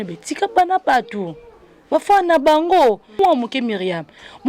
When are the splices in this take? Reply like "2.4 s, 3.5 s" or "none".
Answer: 3.2 s